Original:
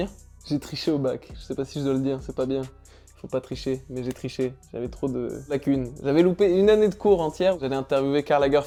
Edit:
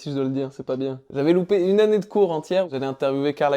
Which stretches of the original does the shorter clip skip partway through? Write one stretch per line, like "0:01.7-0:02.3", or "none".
0:02.7-0:05.9